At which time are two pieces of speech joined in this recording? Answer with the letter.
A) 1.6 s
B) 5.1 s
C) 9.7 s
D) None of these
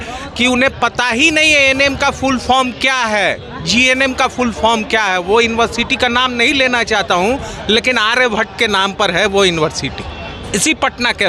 D